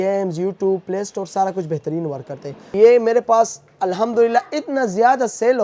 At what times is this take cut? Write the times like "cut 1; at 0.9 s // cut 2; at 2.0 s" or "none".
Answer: cut 1; at 2.7 s